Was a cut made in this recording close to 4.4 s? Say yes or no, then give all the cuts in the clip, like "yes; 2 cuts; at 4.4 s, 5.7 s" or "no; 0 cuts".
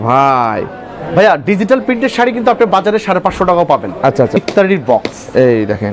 yes; 1 cut; at 4.4 s